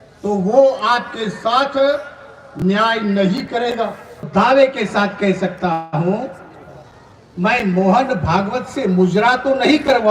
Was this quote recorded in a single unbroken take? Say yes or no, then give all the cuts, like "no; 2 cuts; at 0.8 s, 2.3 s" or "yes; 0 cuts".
no; 1 cut; at 4.3 s